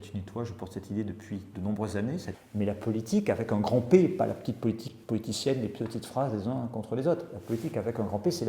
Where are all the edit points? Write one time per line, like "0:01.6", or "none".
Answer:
0:02.3